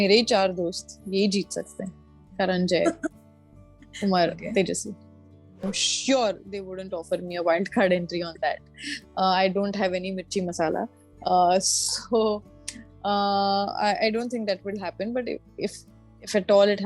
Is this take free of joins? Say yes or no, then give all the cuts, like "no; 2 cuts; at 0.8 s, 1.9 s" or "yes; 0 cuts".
no; 1 cut; at 5.6 s